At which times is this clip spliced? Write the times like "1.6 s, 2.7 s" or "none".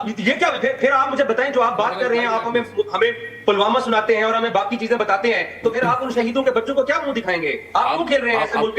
none